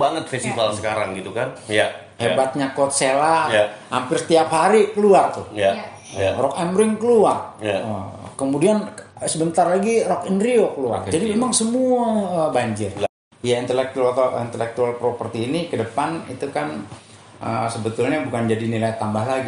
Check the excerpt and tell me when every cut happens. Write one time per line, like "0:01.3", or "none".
0:01.6
0:13.1